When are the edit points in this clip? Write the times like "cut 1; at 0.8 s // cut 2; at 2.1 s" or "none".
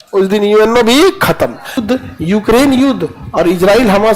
cut 1; at 1.8 s